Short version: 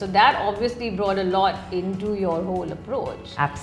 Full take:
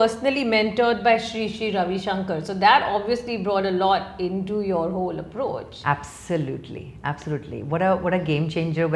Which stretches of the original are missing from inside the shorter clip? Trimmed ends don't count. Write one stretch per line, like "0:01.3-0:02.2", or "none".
none